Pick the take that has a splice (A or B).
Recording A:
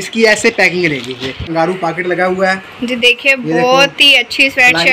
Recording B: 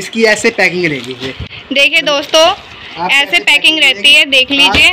A